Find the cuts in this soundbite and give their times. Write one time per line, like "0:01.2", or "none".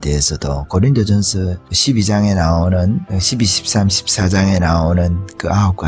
0:01.2
0:03.1

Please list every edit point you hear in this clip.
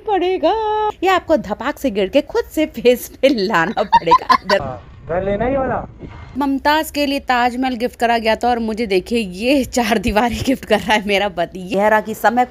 0:00.9
0:04.6
0:06.3
0:11.7

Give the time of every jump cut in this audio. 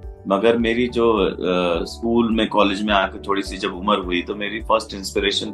none

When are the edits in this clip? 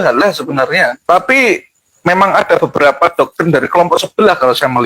0:01.0

